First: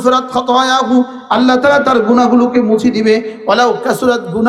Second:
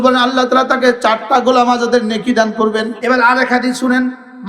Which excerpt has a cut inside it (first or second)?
second